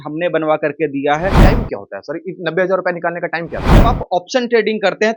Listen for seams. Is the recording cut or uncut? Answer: cut